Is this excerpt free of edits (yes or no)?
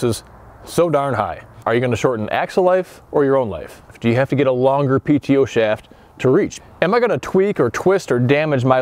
no